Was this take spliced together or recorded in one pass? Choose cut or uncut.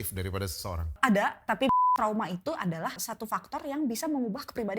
cut